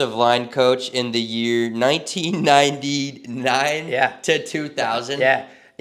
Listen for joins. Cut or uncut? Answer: uncut